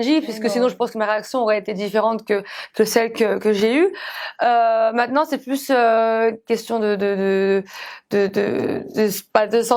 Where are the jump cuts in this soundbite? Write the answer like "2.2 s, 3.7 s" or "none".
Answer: none